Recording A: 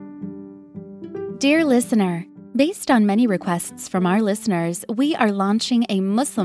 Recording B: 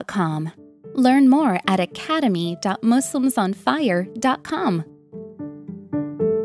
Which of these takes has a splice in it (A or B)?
A